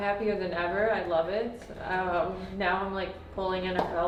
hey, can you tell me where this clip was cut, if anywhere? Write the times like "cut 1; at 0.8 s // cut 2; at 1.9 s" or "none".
none